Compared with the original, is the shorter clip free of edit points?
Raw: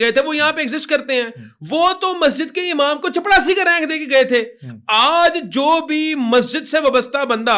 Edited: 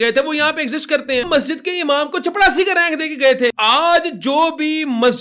no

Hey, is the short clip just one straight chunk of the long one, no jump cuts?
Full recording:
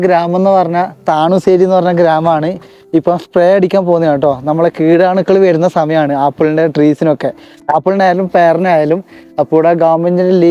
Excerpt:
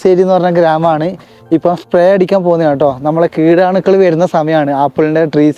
yes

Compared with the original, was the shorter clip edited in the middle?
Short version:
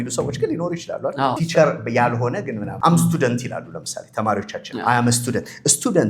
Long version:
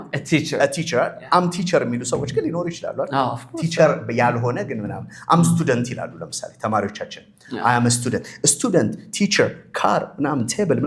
yes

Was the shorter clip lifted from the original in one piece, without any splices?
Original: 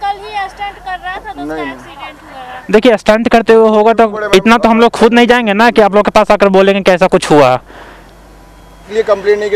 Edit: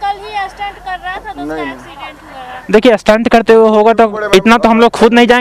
yes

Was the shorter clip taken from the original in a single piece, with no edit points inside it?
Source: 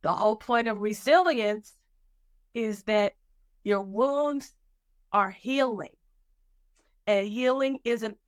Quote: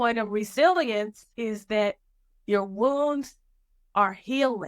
no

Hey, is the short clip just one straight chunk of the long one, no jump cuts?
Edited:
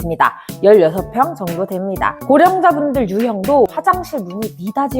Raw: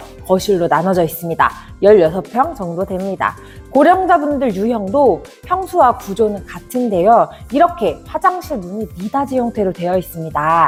no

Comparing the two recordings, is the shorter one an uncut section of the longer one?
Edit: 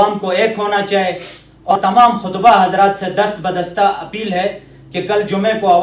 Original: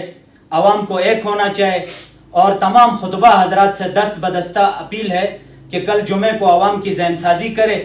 no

